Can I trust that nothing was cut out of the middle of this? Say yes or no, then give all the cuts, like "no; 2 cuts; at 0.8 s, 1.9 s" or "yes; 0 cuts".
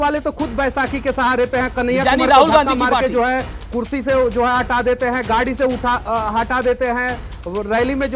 yes; 0 cuts